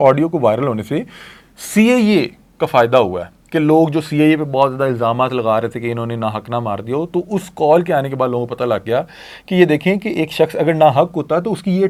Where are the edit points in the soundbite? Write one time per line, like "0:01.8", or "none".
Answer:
none